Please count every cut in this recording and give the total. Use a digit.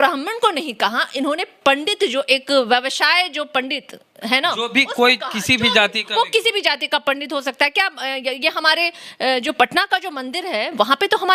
0